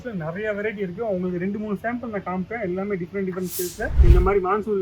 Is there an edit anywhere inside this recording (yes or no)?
yes